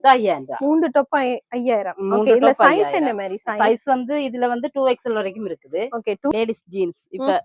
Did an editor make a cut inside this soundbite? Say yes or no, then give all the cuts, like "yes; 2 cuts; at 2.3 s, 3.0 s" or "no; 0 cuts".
yes; 1 cut; at 6.3 s